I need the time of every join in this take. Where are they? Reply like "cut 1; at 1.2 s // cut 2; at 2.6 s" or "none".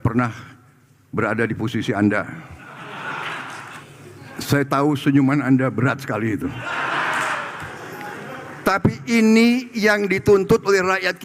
cut 1; at 3.6 s // cut 2; at 7.6 s